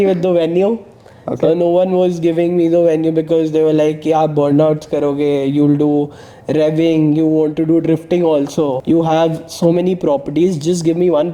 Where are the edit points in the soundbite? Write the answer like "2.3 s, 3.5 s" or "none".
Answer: 8.8 s